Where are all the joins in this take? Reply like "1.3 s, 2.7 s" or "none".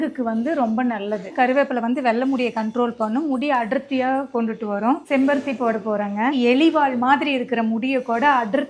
1.3 s, 5.0 s, 6.3 s